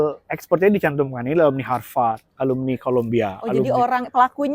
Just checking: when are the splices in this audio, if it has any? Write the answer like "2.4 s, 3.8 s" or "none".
none